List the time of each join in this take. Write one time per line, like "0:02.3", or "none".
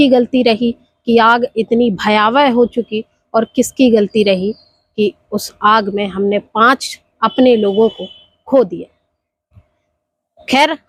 none